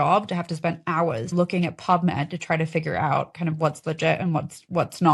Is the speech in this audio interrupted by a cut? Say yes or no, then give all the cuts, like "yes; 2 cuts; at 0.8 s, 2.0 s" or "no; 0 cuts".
no; 0 cuts